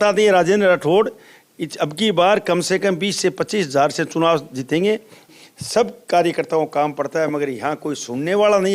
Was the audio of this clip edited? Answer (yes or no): yes